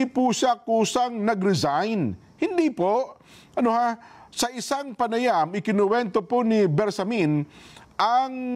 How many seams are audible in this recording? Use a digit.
0